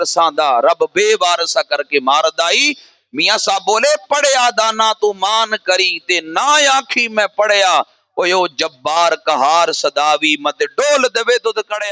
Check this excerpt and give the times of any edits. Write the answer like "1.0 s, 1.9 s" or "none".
none